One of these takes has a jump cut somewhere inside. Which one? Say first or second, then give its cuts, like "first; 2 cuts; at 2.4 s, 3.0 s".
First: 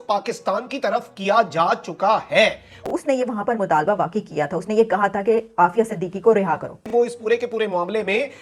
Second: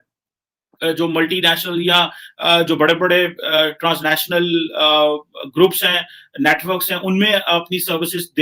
first; 2 cuts; at 2.8 s, 6.8 s